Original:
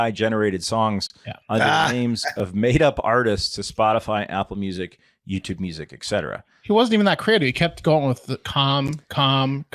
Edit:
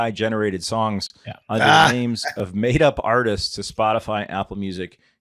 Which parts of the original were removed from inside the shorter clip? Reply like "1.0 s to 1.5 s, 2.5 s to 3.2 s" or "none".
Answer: none